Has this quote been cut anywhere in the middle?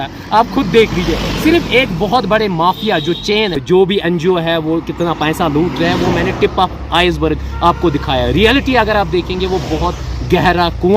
yes; 1 cut; at 3.6 s

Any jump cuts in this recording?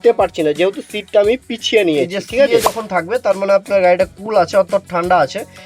yes; 1 cut; at 2.5 s

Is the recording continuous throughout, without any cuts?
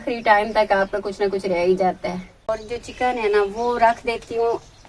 no; 1 cut; at 2.5 s

